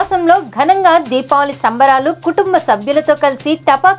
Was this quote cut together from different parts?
no; 0 cuts

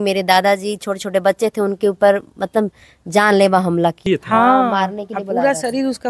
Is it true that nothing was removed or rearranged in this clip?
no; 1 cut; at 4.0 s

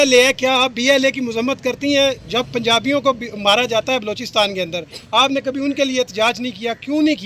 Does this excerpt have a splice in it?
no; 0 cuts

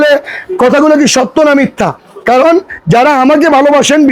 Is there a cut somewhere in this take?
no; 0 cuts

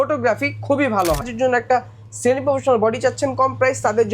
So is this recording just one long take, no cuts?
no; 1 cut; at 1.3 s

